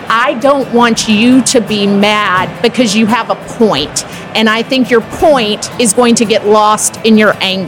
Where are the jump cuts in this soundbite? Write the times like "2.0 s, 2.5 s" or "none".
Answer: none